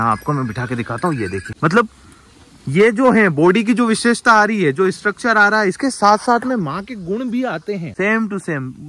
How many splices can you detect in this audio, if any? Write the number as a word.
two